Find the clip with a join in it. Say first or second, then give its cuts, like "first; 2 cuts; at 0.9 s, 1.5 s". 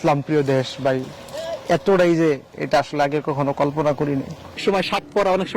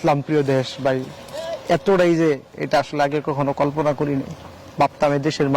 first; 1 cut; at 4.6 s